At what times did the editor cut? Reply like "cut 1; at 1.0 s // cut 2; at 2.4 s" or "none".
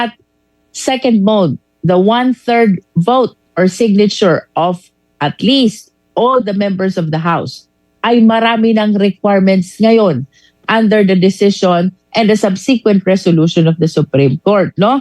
cut 1; at 2.5 s